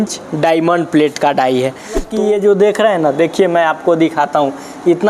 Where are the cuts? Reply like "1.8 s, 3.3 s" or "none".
2.1 s